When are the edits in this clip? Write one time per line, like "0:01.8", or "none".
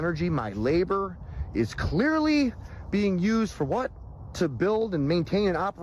none